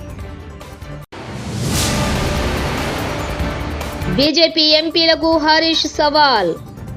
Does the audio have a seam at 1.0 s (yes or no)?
yes